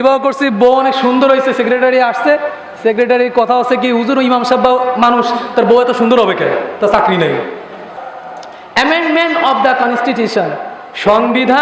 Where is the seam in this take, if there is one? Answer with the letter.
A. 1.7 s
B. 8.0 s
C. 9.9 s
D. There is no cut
B